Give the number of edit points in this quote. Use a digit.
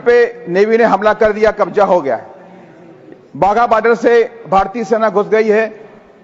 0